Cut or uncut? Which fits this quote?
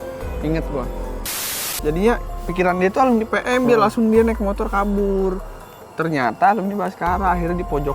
cut